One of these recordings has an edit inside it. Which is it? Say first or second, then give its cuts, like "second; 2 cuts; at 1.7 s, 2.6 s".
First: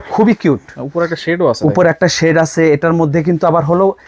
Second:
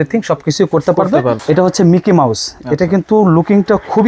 second; 1 cut; at 1.4 s